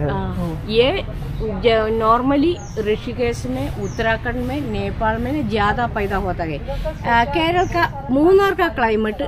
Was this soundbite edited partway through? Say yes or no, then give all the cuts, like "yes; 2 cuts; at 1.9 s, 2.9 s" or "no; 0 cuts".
no; 0 cuts